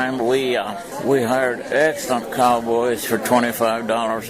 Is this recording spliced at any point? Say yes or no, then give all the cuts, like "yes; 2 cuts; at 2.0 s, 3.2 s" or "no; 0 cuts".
yes; 1 cut; at 0.9 s